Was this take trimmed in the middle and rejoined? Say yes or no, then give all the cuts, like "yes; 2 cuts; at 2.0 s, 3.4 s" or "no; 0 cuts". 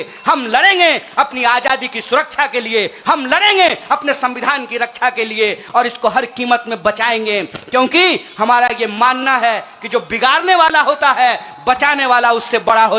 no; 0 cuts